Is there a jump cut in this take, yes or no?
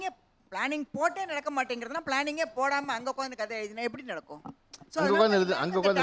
no